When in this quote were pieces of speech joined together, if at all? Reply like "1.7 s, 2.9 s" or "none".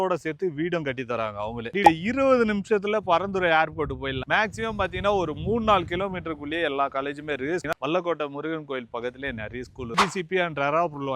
1.8 s, 4.2 s, 7.7 s, 10.0 s